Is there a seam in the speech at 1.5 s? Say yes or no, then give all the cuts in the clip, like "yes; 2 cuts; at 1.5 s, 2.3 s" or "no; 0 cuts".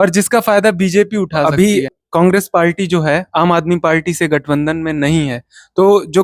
yes; 1 cut; at 1.5 s